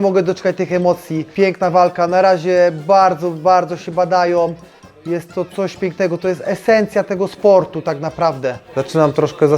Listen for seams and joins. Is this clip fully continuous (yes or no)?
no